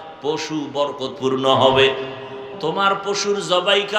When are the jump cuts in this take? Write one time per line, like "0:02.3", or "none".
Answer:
0:02.5

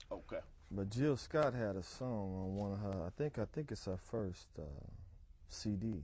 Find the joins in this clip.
none

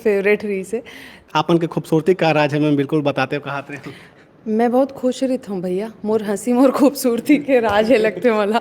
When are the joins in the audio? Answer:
0:01.3
0:05.9

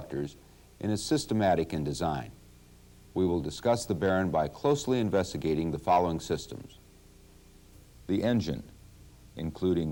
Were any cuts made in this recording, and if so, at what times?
none

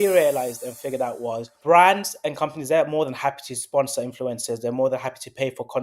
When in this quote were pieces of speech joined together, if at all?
0:01.5

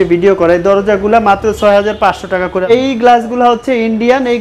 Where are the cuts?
0:02.6

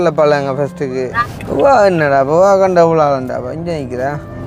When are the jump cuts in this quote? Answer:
0:01.2

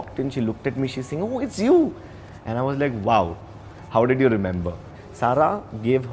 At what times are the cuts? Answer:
0:04.9

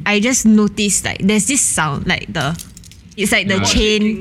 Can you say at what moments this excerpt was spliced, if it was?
0:03.2

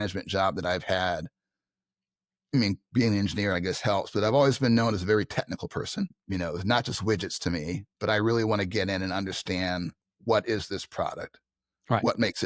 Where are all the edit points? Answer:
0:06.2

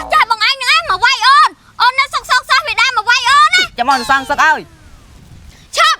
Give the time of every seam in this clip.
0:03.7

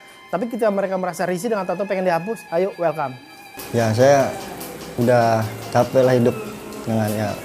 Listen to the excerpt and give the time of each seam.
0:03.5

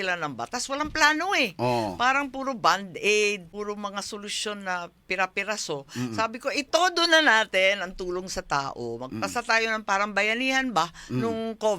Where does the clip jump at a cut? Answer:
0:03.5

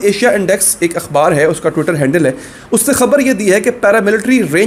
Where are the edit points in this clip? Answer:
none

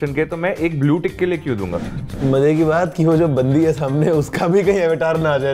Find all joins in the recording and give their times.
0:02.1

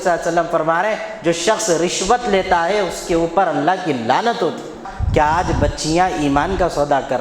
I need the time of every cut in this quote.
0:04.9

